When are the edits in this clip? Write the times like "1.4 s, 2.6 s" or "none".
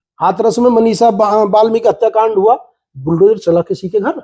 none

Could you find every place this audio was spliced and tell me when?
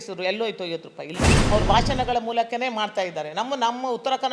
1.4 s

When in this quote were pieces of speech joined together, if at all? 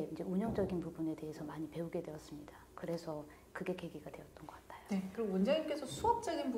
5.1 s

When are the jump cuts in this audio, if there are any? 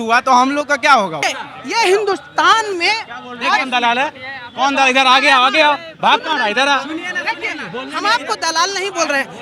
1.3 s

